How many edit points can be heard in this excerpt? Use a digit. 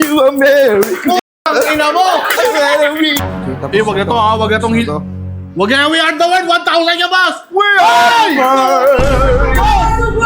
1